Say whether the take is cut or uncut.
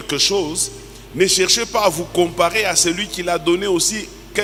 uncut